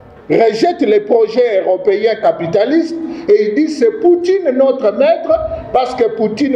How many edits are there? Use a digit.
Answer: 0